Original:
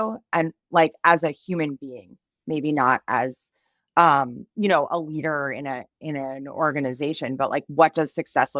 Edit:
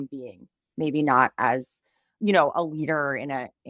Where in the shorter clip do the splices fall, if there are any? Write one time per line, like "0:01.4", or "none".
0:02.1